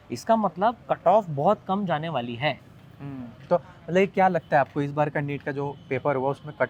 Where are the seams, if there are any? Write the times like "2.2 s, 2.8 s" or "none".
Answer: none